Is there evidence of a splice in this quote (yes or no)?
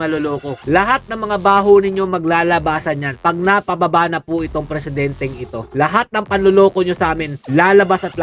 no